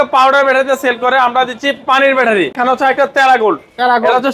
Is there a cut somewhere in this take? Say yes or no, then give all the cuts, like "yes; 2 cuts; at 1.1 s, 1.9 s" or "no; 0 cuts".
yes; 1 cut; at 2.5 s